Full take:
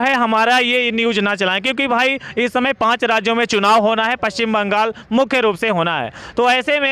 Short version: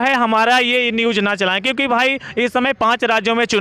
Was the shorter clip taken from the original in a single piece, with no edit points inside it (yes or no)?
yes